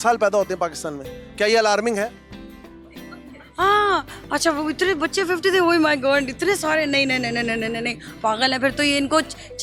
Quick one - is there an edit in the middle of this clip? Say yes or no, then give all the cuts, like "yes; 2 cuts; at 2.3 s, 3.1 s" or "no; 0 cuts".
no; 0 cuts